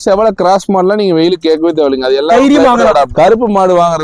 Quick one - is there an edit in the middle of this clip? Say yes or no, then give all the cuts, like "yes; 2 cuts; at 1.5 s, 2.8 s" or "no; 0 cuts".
yes; 1 cut; at 3.1 s